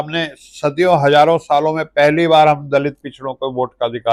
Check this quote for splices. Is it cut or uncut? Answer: uncut